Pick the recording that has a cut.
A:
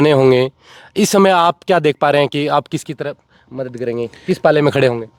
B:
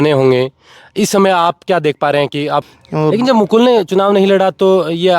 B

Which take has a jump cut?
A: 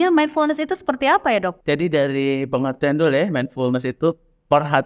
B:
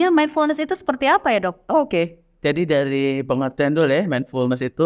A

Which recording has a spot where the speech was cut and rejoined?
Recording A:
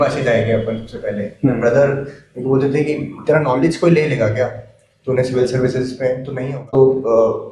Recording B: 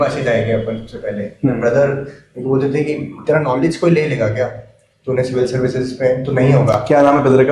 A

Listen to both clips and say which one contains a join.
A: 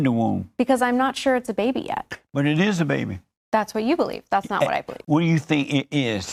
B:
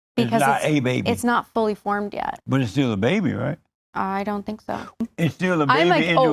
B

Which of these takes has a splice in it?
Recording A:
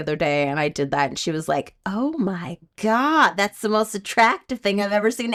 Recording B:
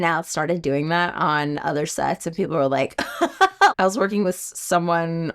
B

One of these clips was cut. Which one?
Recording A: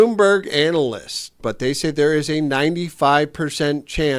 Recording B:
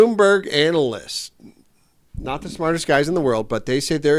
A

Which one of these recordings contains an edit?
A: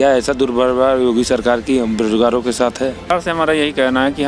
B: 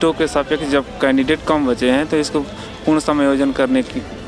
A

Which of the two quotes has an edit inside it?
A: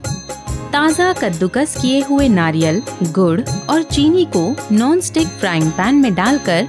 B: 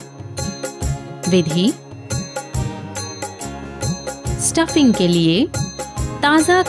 B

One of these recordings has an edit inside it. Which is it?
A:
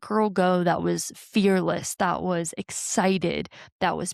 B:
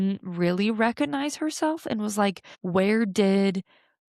B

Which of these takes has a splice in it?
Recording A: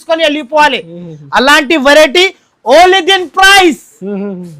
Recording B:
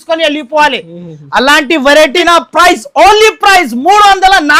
B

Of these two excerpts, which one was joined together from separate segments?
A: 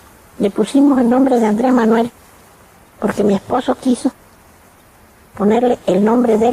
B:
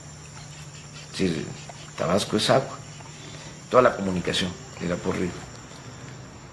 A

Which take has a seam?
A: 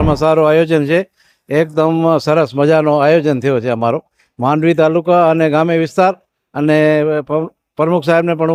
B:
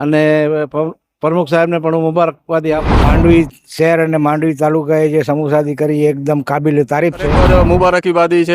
B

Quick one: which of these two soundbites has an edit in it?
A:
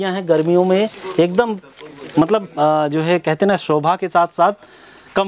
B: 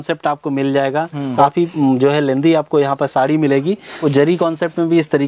B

